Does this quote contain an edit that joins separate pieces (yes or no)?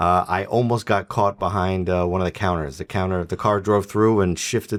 no